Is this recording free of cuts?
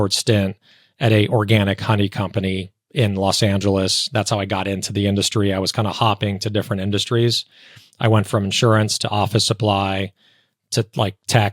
yes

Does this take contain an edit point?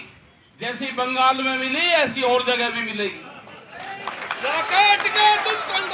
no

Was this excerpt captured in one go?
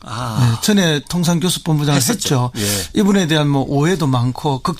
no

